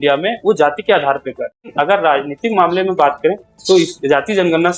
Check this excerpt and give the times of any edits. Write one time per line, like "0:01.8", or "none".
0:01.6